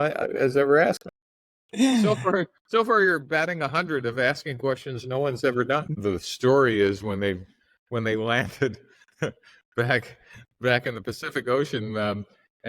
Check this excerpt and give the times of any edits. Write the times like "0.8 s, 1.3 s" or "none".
5.9 s